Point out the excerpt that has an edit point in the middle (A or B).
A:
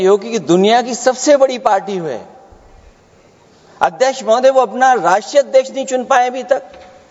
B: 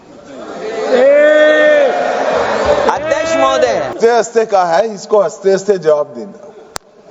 B